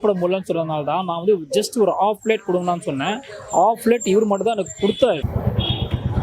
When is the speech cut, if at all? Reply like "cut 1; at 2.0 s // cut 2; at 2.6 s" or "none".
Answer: cut 1; at 5.3 s